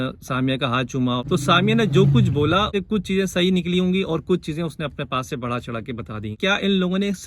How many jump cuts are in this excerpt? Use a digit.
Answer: 3